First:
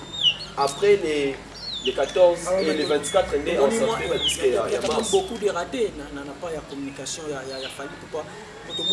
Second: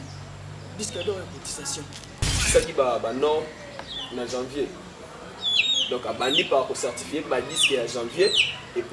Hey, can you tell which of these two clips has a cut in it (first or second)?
second